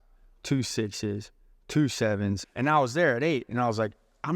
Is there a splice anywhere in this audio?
yes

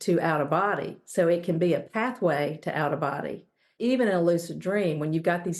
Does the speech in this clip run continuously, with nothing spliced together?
no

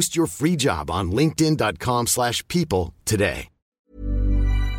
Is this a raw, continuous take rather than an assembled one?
no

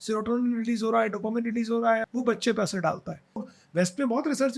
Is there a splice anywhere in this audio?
yes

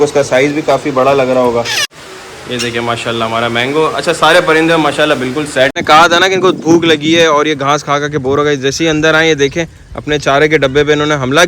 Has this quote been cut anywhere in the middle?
yes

